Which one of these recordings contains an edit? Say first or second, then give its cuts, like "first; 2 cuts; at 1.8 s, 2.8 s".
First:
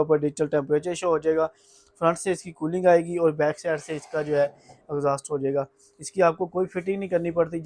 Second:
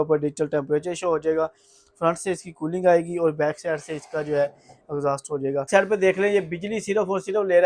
second; 1 cut; at 5.7 s